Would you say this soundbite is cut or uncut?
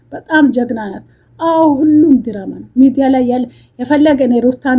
uncut